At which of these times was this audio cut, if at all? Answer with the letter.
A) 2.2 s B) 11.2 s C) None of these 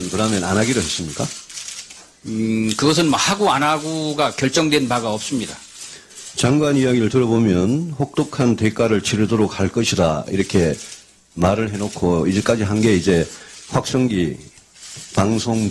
A